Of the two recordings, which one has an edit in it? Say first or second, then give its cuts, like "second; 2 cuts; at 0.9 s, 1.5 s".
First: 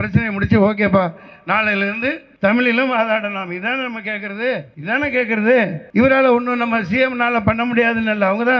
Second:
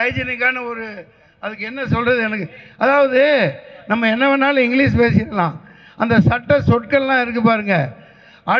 first; 3 cuts; at 2.3 s, 4.7 s, 5.8 s